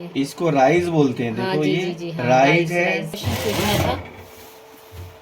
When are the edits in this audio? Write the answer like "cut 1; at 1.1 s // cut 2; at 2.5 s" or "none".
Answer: cut 1; at 3.2 s